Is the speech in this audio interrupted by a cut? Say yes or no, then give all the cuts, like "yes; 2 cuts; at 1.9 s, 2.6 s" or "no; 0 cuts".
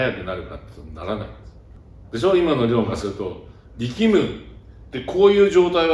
no; 0 cuts